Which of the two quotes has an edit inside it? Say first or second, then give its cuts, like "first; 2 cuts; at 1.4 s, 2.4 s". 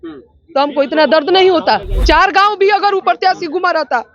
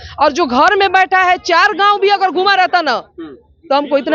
first; 1 cut; at 1.9 s